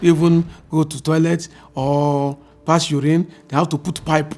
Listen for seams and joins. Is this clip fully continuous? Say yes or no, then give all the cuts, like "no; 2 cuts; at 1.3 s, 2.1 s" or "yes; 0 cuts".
yes; 0 cuts